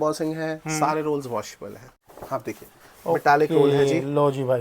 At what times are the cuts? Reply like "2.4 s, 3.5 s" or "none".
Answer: 2.0 s